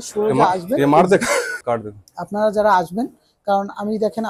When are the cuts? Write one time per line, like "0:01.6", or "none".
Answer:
0:01.6